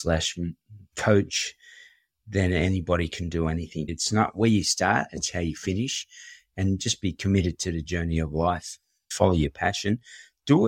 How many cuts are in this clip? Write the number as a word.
two